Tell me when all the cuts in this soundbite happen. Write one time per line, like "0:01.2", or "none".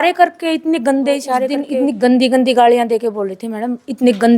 0:01.6